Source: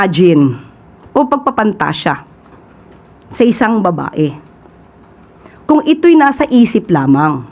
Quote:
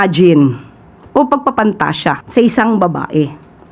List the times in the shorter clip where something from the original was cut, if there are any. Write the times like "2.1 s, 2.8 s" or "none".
2.2 s